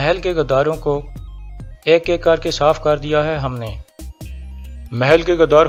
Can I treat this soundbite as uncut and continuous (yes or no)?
yes